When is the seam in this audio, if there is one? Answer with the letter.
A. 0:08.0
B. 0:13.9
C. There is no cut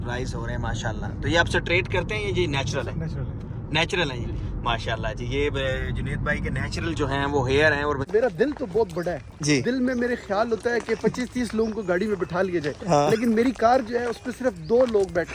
A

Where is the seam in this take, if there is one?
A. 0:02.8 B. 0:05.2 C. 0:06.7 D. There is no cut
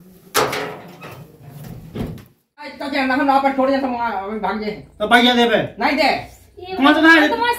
A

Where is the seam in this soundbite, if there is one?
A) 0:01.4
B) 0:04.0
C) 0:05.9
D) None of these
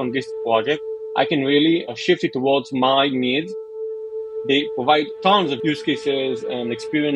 B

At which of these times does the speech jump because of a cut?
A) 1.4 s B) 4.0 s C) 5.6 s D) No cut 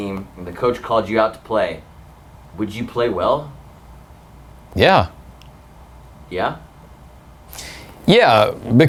D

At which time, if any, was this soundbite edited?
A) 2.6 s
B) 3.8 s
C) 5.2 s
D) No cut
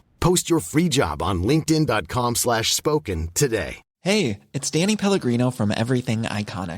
B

